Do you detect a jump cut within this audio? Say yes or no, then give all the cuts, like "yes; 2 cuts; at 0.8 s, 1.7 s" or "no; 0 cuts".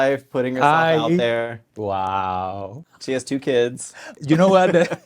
yes; 3 cuts; at 1.6 s, 2.8 s, 4.2 s